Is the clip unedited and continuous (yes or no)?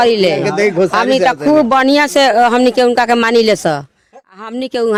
yes